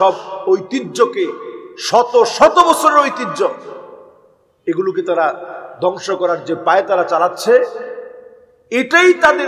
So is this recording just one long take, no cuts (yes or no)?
yes